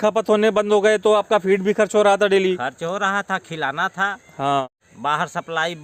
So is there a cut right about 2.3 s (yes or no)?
no